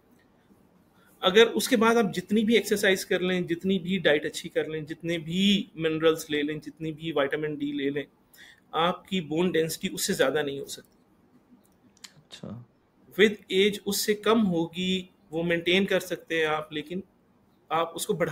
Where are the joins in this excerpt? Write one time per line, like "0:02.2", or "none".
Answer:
none